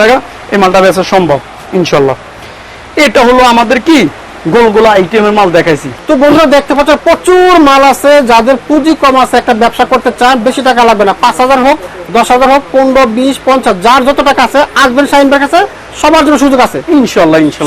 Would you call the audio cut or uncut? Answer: uncut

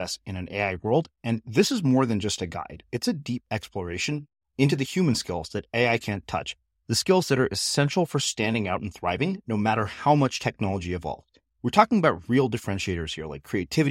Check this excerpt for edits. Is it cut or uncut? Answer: uncut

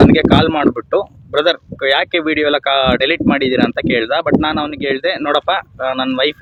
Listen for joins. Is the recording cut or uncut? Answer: uncut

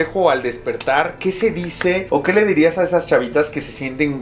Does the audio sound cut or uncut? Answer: uncut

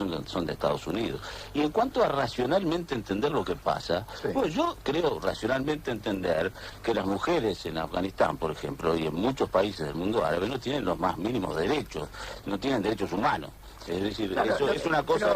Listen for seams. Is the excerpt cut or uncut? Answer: cut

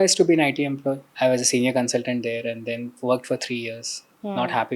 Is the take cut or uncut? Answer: cut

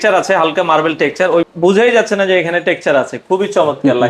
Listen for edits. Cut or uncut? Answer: cut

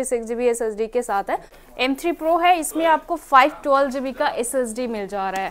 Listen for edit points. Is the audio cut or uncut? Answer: cut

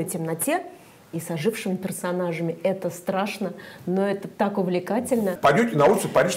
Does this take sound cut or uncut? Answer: cut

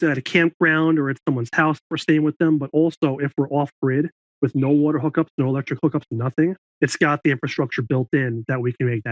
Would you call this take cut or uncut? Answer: cut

